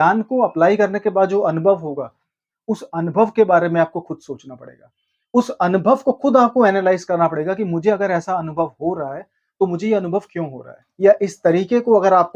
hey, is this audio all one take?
no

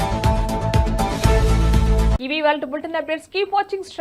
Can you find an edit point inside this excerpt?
no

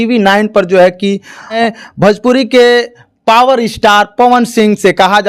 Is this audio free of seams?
no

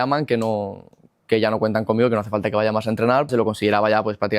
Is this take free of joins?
no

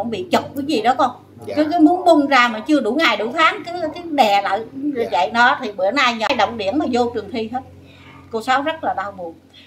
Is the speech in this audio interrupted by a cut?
yes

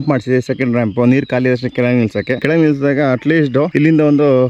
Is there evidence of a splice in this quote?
no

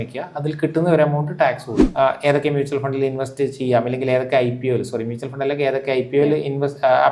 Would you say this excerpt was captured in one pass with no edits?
no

